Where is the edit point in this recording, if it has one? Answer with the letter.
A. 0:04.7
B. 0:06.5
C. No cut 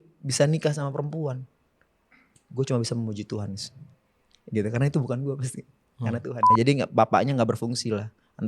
B